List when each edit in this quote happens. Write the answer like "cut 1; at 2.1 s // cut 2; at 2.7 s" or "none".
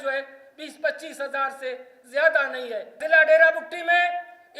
cut 1; at 3.0 s